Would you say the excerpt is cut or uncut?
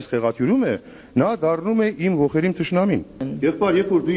cut